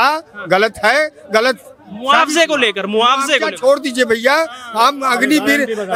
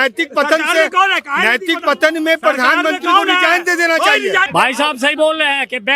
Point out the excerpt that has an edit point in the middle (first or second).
second